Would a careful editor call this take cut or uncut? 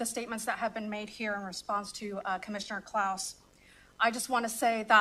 uncut